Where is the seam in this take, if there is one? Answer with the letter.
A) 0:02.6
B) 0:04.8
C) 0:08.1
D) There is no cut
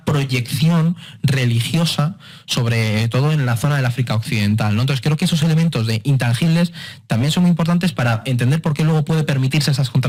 D